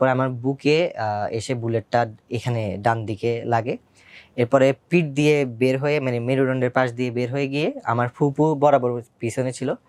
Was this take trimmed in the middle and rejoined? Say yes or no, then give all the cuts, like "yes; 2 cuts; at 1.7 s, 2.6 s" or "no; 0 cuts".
no; 0 cuts